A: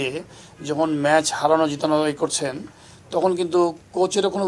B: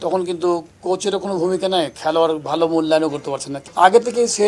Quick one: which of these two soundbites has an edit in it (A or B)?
B